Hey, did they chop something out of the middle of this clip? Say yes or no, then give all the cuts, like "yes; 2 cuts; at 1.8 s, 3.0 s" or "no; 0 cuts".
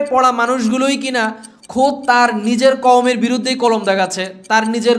no; 0 cuts